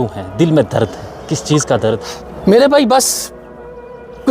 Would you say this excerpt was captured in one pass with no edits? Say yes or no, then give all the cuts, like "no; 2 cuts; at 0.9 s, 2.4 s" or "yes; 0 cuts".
no; 1 cut; at 2.0 s